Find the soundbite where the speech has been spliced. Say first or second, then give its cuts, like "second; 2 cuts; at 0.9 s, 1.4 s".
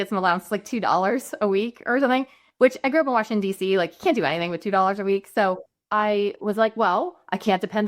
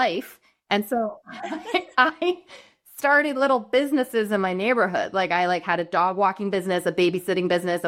first; 1 cut; at 5.9 s